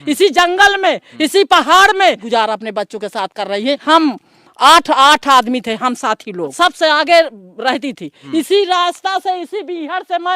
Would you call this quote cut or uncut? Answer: cut